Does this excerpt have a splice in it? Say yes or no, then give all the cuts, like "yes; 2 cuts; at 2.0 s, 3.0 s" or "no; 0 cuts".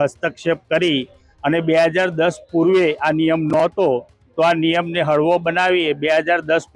no; 0 cuts